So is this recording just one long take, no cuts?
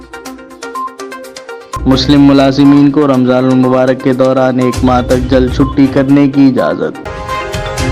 no; 2 cuts; at 1.7 s, 7.0 s

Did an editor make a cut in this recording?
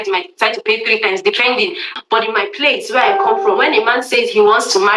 yes; 1 cut; at 1.9 s

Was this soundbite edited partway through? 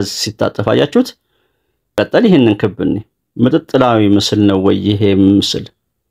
yes; 1 cut; at 1.9 s

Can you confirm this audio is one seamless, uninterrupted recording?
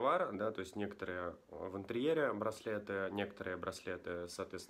yes; 0 cuts

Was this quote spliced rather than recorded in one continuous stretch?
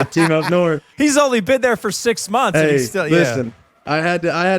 yes; 1 cut; at 1.0 s

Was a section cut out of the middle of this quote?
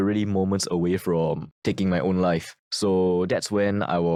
no; 0 cuts

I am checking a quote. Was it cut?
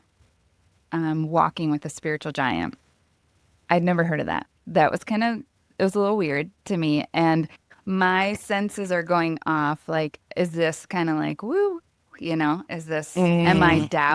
no; 0 cuts

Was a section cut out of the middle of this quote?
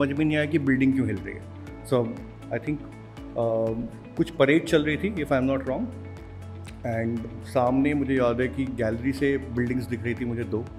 no; 0 cuts

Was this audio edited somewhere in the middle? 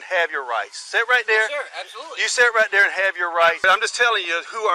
yes; 1 cut; at 3.6 s

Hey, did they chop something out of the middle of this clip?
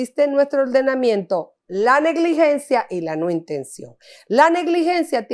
no; 0 cuts

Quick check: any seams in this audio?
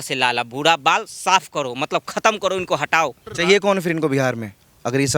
yes; 1 cut; at 3.3 s

